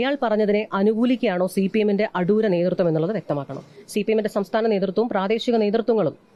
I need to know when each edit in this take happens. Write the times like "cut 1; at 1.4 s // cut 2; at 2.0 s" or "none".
none

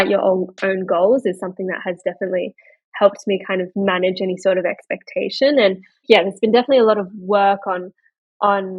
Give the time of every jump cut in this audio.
cut 1; at 6.0 s

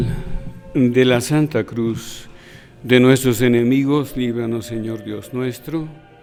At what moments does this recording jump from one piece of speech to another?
none

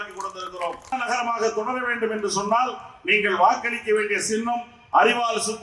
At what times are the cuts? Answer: cut 1; at 0.9 s

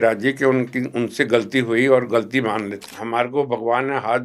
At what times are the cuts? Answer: cut 1; at 3.0 s

